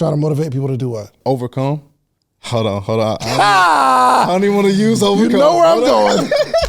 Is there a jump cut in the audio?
yes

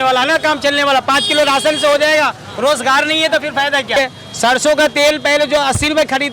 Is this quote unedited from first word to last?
no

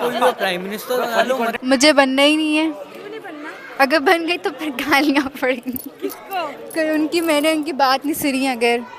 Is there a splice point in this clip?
yes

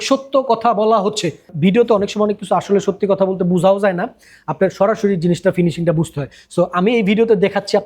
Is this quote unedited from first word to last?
no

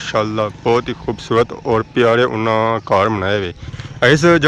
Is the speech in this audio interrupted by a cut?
yes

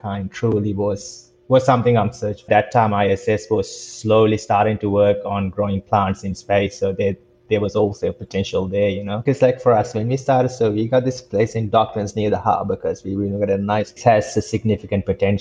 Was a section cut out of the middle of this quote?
yes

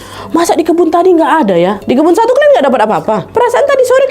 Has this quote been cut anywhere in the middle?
yes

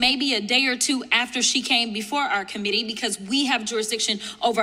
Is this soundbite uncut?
yes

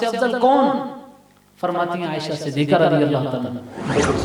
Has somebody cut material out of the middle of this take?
no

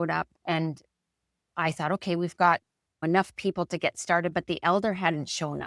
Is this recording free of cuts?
yes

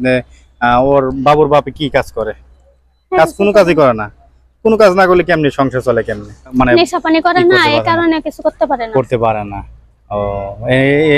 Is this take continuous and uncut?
no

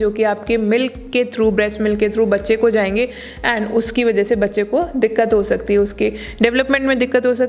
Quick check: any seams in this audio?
no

